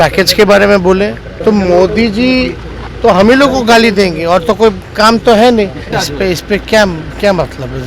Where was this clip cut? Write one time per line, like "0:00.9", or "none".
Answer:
0:01.3
0:05.9